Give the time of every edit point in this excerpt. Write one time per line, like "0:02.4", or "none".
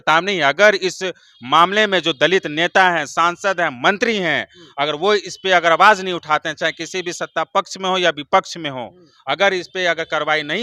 none